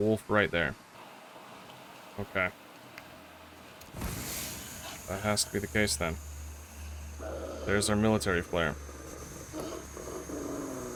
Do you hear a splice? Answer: no; 0 cuts

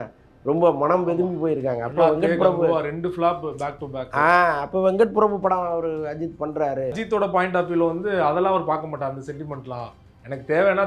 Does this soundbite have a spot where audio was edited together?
yes; 1 cut; at 7.0 s

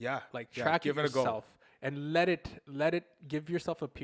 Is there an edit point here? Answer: no; 0 cuts

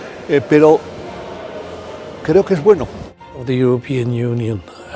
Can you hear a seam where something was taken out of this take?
yes; 1 cut; at 3.3 s

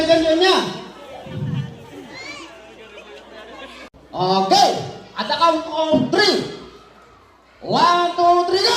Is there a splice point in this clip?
yes; 1 cut; at 3.9 s

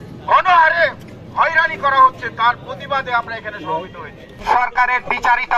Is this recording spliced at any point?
yes; 1 cut; at 4.3 s

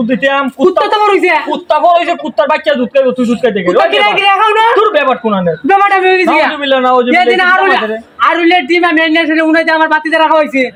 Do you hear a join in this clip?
no; 0 cuts

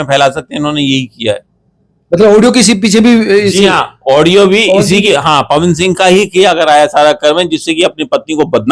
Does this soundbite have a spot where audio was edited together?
no; 0 cuts

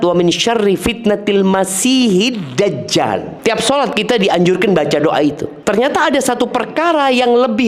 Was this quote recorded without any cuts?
no; 2 cuts; at 3.3 s, 5.5 s

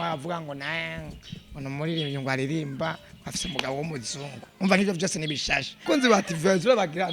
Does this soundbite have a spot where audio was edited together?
yes; 1 cut; at 5.9 s

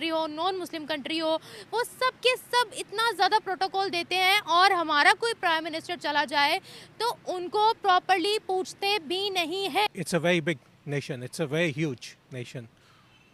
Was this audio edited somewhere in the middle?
no; 0 cuts

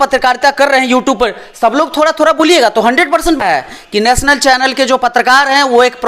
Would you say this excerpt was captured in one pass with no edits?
no; 1 cut; at 3.4 s

